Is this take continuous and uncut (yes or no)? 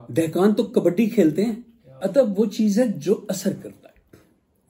no